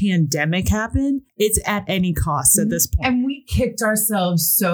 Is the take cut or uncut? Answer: cut